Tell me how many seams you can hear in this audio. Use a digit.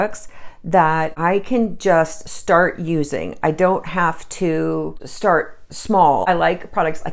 3